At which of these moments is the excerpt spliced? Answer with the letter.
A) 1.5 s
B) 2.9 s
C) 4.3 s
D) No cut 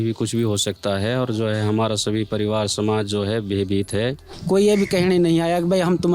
C